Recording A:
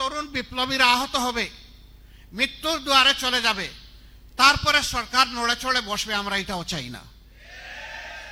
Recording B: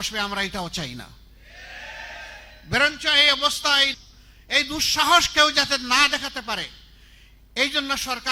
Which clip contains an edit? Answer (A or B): B